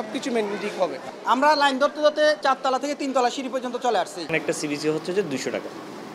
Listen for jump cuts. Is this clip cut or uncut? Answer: cut